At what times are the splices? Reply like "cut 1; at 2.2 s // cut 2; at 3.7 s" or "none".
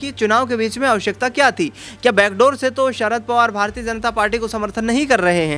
none